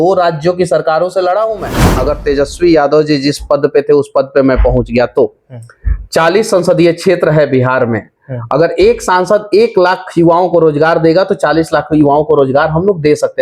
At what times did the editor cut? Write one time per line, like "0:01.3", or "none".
0:01.8